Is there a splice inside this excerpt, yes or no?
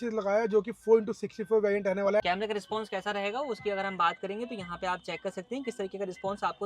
yes